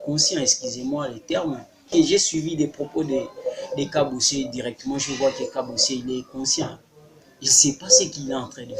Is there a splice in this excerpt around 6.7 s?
no; 1 cut; at 1.9 s

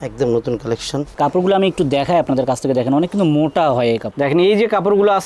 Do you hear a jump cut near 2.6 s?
no; 2 cuts; at 1.1 s, 4.1 s

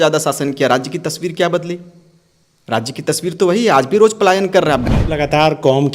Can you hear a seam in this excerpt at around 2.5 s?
no; 1 cut; at 4.8 s

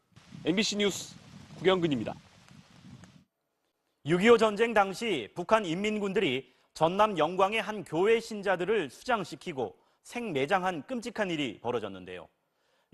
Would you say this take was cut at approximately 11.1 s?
no; 0 cuts

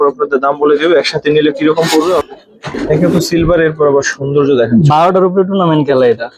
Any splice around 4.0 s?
no; 1 cut; at 2.7 s

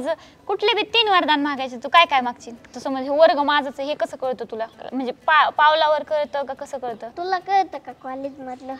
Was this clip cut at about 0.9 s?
no; 3 cuts; at 2.7 s, 4.8 s, 7.1 s

